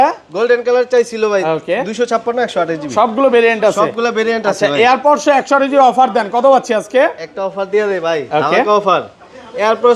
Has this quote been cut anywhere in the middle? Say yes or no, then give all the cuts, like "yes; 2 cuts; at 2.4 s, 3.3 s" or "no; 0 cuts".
no; 0 cuts